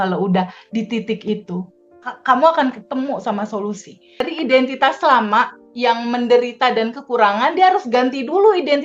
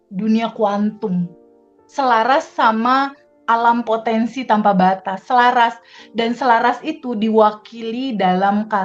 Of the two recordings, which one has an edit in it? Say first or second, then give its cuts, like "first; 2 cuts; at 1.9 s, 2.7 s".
first; 1 cut; at 4.3 s